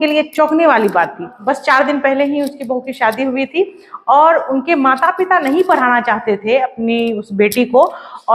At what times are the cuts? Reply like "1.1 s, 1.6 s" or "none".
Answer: 1.3 s